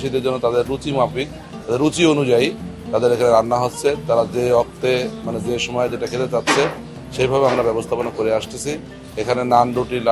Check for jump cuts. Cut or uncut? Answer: uncut